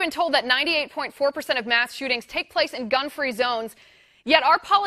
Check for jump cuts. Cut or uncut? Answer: uncut